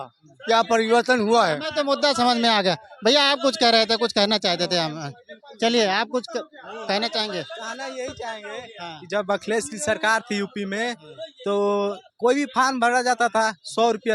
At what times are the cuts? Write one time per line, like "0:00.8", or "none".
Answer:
none